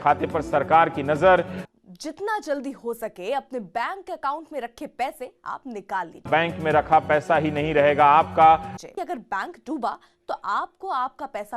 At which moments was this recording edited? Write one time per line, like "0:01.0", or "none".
0:01.6
0:06.2
0:08.7